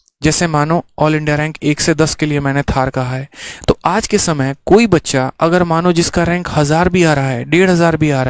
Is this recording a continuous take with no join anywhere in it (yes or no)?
yes